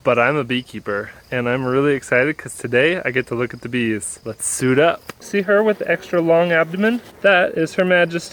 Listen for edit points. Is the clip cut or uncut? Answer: cut